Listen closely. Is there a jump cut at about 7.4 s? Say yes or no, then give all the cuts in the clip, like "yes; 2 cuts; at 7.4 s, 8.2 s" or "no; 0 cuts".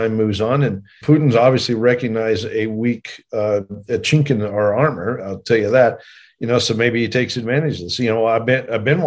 no; 1 cut; at 1.0 s